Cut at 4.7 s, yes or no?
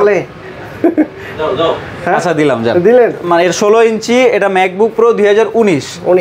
no